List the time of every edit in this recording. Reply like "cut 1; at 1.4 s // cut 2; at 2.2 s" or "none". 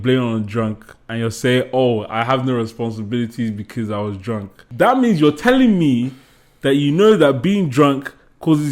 cut 1; at 1.1 s // cut 2; at 4.6 s